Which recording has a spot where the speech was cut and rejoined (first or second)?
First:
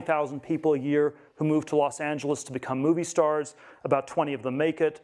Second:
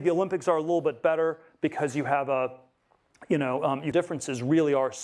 second